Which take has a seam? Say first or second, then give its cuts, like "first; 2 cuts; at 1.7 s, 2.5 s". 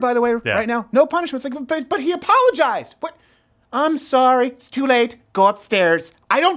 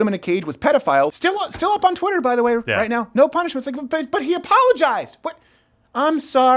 second; 1 cut; at 1.1 s